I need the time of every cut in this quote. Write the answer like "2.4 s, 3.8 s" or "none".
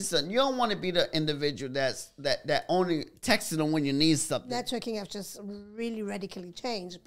4.4 s